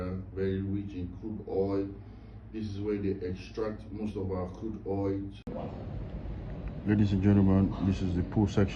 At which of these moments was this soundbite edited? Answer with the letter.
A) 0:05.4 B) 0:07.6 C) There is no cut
A